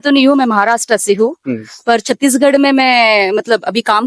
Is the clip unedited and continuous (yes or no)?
yes